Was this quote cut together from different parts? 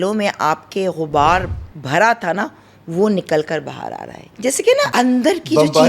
yes; 1 cut; at 4.5 s

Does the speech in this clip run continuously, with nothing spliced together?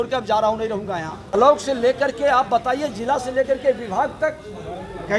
no; 1 cut; at 1.3 s

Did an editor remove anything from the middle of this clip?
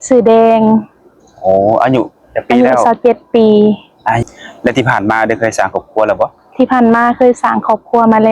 yes; 1 cut; at 4.2 s

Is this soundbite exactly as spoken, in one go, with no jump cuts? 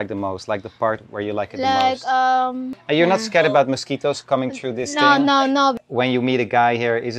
no; 2 cuts; at 2.7 s, 5.8 s

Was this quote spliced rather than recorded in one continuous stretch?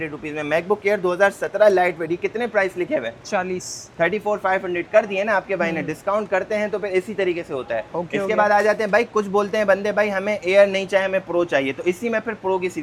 no; 0 cuts

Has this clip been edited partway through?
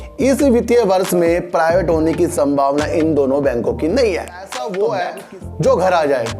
yes; 1 cut; at 4.4 s

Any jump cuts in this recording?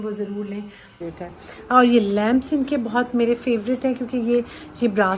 yes; 1 cut; at 1.0 s

